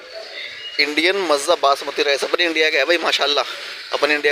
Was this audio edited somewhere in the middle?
no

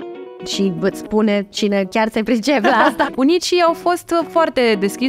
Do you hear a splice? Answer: yes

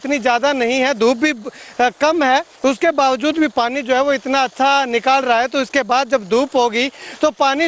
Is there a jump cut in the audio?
no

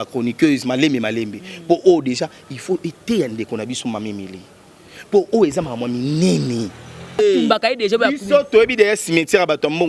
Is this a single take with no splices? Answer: no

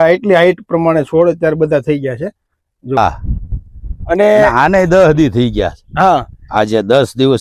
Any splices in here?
yes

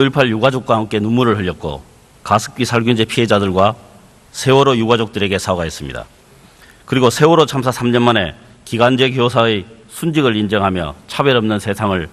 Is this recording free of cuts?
no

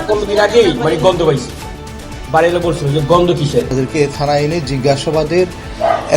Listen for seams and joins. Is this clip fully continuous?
no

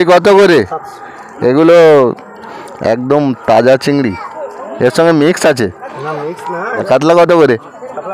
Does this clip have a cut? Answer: yes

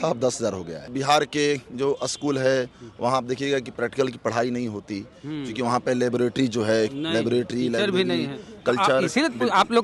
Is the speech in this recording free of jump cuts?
no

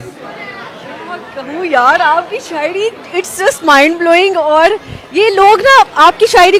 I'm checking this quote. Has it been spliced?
no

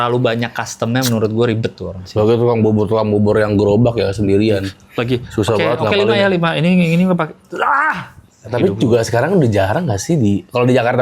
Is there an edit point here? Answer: yes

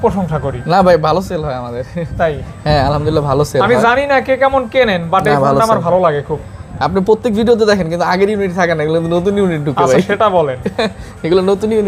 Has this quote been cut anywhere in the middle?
no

